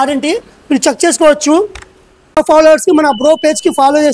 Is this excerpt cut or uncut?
cut